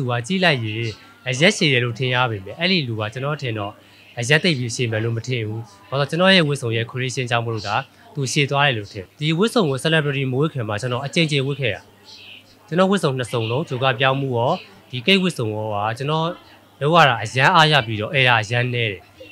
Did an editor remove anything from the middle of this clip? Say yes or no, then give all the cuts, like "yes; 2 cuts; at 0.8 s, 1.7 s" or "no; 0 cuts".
yes; 1 cut; at 8.9 s